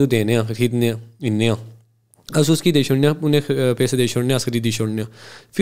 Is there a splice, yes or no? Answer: no